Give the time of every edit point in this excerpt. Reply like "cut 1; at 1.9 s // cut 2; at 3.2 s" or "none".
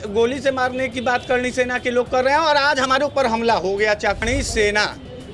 cut 1; at 4.2 s

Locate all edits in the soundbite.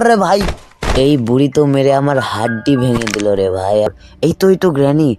cut 1; at 3.9 s

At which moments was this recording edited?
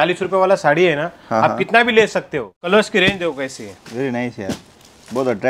cut 1; at 2.5 s

